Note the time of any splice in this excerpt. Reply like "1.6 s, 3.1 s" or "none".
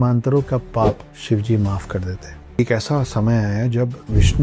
1.1 s, 2.6 s